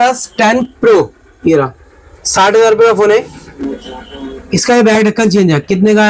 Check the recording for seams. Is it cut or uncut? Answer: uncut